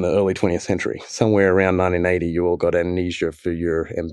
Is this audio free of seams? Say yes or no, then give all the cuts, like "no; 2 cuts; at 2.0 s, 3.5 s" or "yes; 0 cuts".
yes; 0 cuts